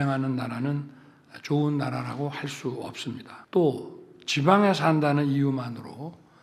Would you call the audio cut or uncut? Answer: cut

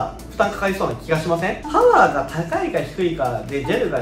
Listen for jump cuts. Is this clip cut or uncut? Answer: cut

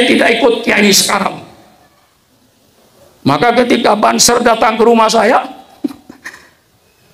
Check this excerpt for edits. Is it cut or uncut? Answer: uncut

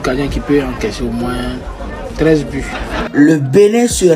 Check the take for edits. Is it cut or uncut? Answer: cut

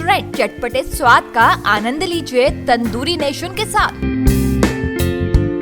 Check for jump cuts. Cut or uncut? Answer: uncut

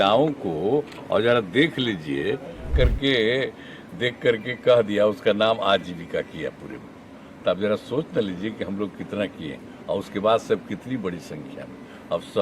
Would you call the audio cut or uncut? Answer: cut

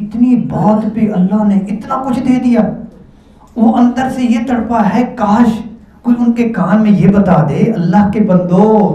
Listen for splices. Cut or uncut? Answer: uncut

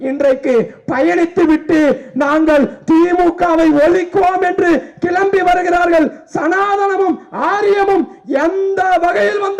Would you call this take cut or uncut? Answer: uncut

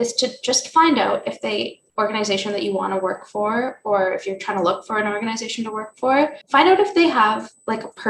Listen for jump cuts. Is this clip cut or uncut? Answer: cut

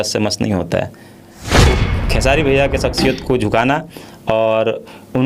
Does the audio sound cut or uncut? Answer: cut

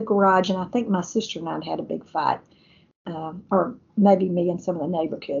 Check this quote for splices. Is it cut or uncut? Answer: uncut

